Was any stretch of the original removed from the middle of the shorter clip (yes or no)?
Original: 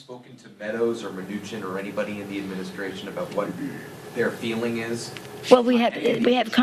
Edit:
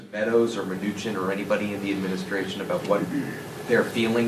no